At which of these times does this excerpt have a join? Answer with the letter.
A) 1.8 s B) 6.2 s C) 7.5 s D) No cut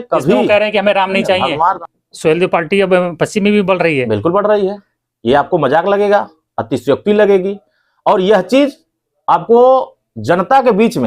A